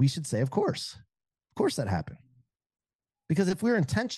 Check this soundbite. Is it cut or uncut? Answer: uncut